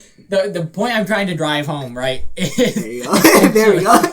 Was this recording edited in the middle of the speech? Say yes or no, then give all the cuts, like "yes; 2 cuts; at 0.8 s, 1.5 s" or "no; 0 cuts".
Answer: yes; 1 cut; at 3.2 s